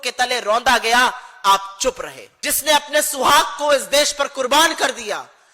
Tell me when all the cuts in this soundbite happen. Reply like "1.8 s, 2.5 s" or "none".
2.3 s